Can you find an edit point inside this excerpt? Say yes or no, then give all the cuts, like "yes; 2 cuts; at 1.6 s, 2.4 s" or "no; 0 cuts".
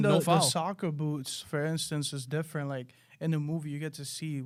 no; 0 cuts